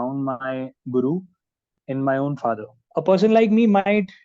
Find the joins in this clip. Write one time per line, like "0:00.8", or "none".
0:02.7